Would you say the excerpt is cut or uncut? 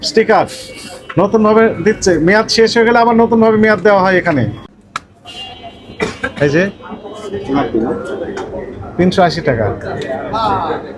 cut